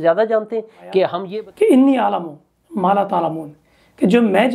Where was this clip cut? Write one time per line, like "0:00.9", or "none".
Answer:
0:01.2